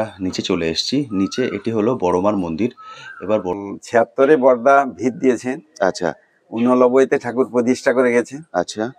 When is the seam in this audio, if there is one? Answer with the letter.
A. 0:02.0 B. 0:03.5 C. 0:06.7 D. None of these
B